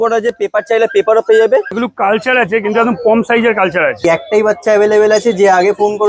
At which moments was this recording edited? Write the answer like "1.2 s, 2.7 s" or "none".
1.7 s, 4.0 s

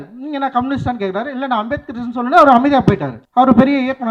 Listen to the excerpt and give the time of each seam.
3.1 s

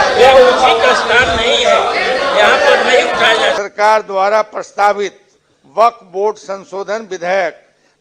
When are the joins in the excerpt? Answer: 3.6 s

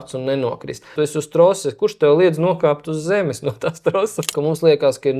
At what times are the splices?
0.9 s, 4.3 s

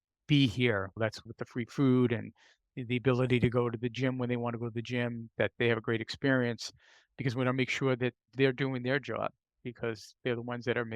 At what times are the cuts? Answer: 1.2 s, 8.3 s, 10.1 s

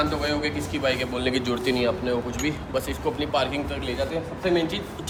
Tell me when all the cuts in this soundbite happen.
none

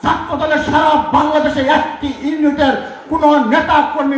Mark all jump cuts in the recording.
none

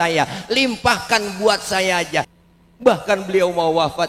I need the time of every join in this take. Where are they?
2.3 s

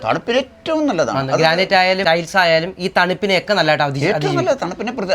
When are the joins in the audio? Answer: 2.0 s

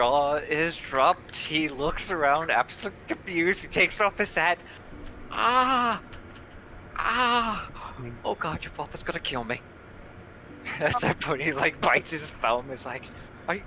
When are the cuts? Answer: none

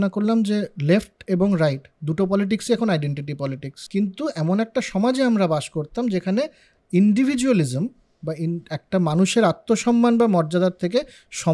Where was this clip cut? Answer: 3.7 s

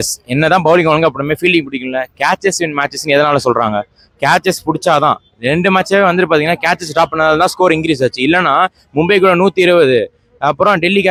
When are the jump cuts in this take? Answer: none

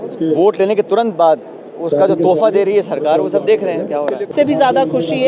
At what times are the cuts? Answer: 4.3 s

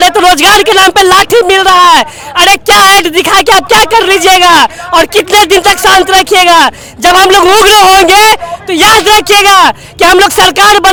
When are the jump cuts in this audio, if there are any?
none

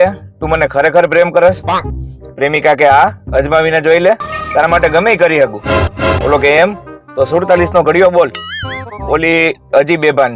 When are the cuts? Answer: none

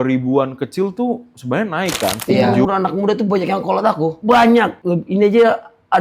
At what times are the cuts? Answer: 2.6 s

